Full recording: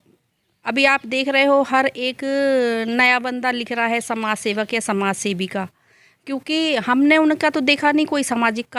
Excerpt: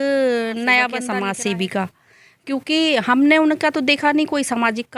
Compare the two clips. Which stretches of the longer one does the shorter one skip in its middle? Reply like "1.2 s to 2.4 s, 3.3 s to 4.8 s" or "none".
3.4 s to 4.9 s